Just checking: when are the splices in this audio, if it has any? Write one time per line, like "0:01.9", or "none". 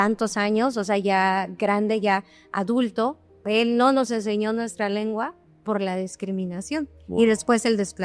0:03.4